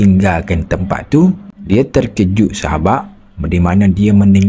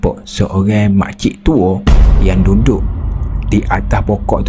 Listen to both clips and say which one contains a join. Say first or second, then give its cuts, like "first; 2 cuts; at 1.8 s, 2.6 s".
first; 1 cut; at 1.5 s